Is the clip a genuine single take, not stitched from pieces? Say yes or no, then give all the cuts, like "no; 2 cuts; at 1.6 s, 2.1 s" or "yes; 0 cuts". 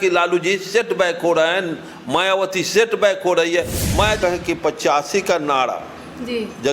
no; 1 cut; at 4.2 s